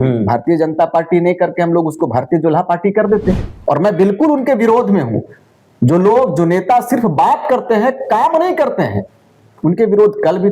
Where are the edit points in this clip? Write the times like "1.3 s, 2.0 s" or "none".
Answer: 3.4 s